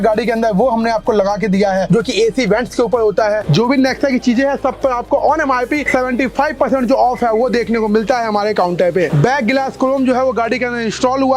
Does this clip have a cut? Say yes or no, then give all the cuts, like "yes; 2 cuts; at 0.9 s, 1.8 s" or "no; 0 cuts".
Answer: yes; 2 cuts; at 3.4 s, 9.1 s